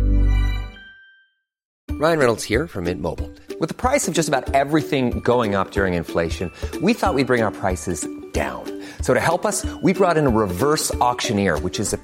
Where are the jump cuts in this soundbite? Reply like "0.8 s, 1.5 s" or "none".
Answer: 1.6 s